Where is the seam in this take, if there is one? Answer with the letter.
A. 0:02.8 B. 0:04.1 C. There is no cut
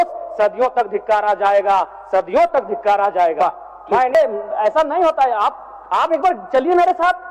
B